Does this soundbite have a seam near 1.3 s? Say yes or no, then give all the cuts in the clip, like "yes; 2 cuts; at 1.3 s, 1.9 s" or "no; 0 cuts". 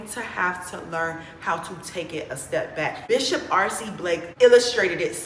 no; 2 cuts; at 3.0 s, 4.3 s